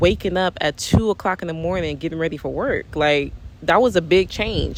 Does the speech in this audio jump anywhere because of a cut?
no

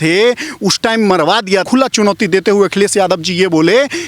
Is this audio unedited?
no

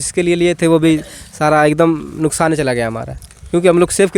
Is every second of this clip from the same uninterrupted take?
yes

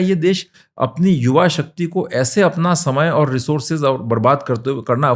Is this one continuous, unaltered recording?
yes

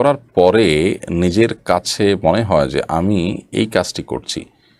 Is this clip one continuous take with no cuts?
yes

